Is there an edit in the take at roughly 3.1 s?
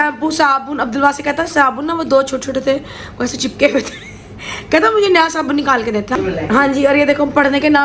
no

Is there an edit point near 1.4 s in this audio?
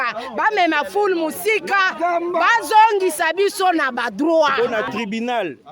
no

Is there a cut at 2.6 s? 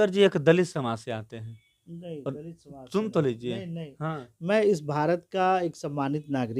no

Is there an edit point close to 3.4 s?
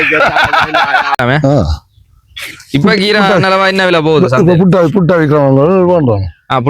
no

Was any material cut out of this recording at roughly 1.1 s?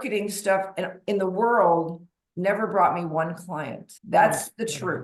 no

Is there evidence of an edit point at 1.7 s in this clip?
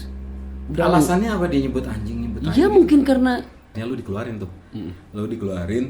no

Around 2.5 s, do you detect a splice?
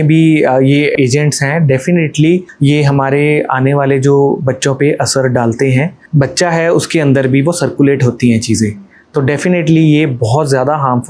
yes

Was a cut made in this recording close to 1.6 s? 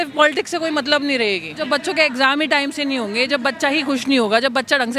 yes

